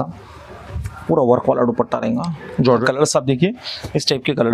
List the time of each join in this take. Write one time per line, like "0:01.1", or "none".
0:02.8